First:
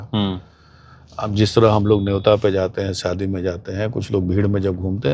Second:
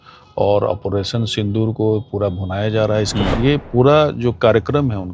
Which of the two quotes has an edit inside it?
second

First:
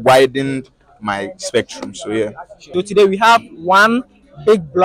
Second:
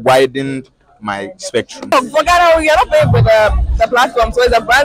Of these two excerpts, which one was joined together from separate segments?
second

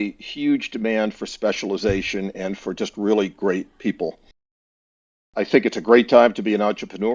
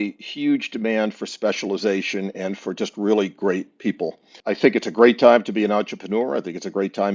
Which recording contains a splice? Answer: second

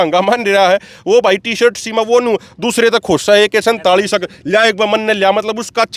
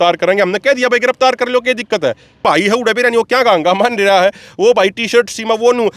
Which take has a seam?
second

